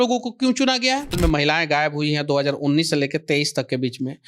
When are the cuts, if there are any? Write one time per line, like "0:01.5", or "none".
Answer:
0:01.2